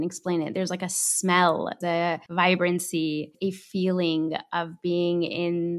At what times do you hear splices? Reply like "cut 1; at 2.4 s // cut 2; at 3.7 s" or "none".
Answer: cut 1; at 2.0 s // cut 2; at 3.3 s